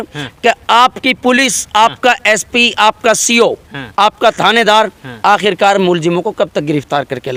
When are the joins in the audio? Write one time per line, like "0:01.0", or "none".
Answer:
none